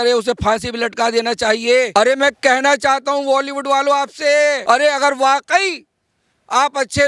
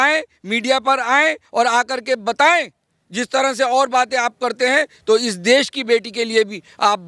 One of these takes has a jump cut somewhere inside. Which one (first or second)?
first